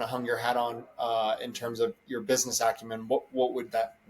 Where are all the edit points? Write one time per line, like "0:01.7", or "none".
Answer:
none